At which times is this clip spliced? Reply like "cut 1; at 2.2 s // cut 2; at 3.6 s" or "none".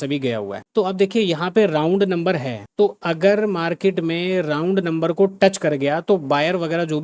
none